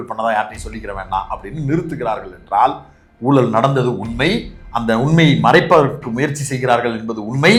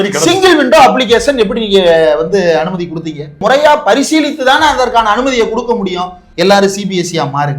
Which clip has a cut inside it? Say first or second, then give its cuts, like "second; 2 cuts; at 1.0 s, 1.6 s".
second; 2 cuts; at 3.4 s, 6.2 s